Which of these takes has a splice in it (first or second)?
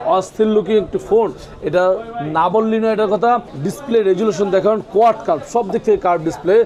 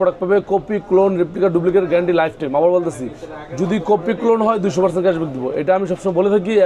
first